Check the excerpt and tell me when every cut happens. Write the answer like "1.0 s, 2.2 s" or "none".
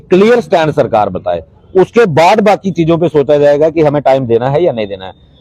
2.3 s

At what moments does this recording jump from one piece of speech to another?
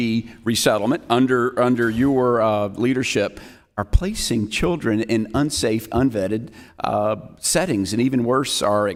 none

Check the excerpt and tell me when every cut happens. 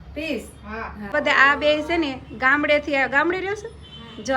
1.1 s

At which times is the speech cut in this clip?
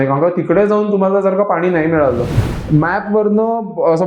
2.3 s

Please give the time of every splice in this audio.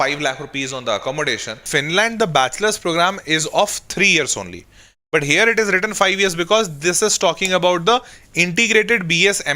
1.6 s

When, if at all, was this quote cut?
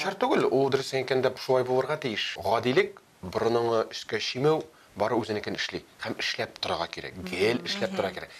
2.3 s

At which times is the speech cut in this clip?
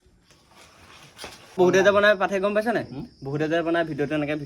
1.6 s

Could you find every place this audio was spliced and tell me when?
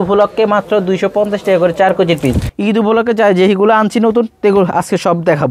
2.5 s

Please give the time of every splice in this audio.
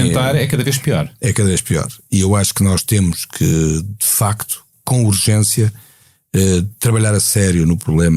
none

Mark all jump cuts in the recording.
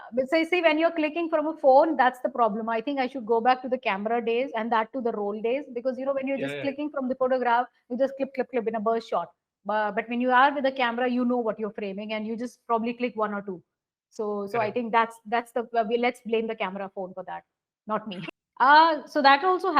18.2 s

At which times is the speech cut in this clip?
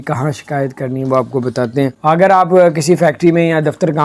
2.0 s

